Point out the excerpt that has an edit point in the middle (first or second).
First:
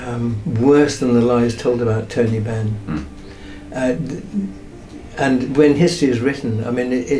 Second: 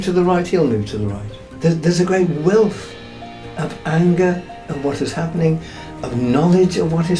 second